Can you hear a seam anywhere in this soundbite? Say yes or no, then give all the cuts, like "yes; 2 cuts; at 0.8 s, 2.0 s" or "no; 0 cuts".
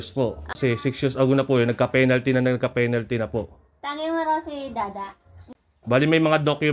yes; 2 cuts; at 0.9 s, 5.4 s